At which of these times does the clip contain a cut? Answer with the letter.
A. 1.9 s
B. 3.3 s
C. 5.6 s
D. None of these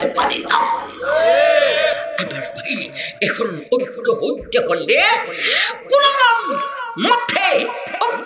A